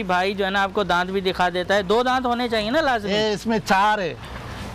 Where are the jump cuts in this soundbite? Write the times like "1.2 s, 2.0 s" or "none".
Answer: none

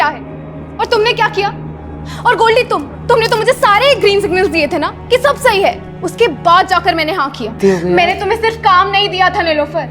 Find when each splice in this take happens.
7.6 s

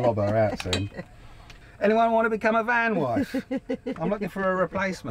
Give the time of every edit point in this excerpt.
none

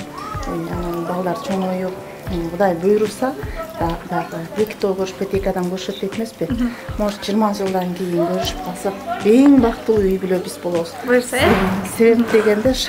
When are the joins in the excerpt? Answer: none

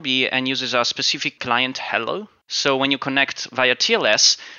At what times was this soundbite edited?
1.3 s, 2.4 s

